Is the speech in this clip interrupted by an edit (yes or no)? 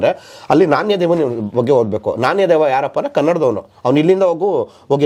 no